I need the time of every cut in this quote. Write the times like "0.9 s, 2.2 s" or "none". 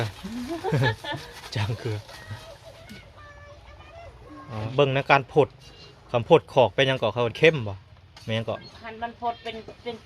4.7 s